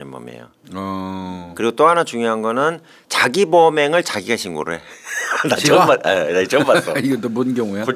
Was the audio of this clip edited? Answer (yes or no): no